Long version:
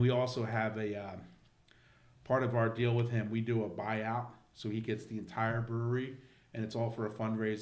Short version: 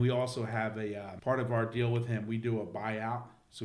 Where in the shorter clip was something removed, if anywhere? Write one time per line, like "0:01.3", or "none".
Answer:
0:01.1